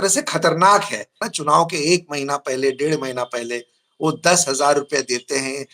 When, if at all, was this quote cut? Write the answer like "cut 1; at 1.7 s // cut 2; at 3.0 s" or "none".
cut 1; at 1.3 s